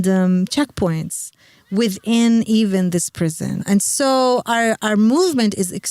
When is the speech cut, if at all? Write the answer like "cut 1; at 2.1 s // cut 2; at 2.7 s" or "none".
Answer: cut 1; at 3.5 s